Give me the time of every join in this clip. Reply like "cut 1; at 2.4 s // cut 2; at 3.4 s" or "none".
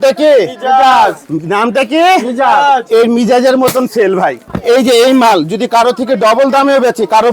cut 1; at 4.4 s

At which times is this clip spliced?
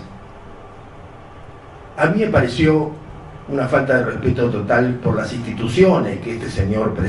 cut 1; at 2.5 s

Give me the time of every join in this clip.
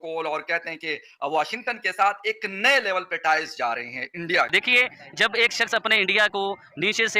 cut 1; at 4.5 s

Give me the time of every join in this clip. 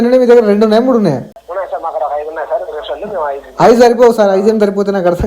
cut 1; at 1.4 s

